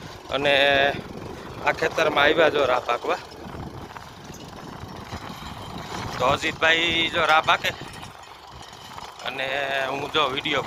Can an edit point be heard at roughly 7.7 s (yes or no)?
no